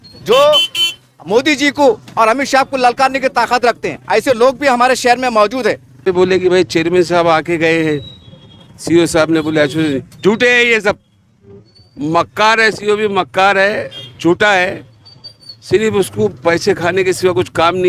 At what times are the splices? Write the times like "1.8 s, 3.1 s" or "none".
6.1 s